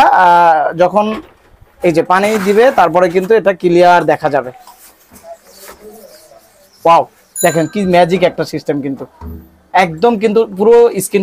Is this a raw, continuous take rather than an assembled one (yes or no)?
yes